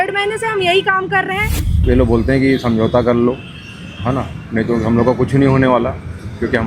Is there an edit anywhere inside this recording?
yes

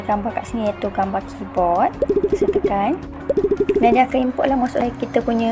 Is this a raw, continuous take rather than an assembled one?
yes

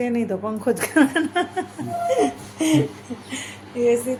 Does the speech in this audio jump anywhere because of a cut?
no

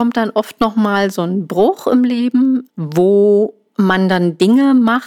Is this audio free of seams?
no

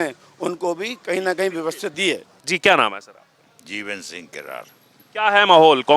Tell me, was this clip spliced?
no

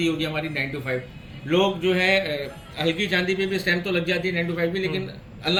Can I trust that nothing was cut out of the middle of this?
yes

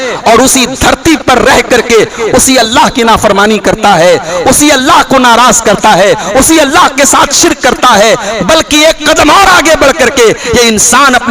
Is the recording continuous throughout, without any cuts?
yes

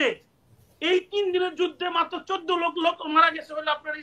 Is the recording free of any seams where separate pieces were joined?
yes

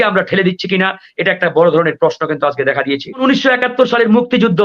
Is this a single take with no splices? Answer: no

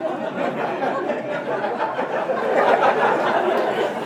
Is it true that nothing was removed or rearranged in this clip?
yes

